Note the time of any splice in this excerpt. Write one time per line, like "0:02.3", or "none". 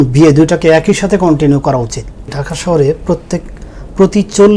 0:02.4